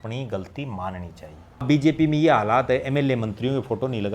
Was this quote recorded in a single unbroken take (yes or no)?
no